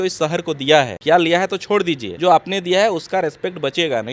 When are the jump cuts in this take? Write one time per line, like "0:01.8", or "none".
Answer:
0:01.0
0:02.1